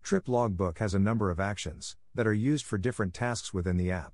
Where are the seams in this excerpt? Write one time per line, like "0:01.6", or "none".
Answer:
none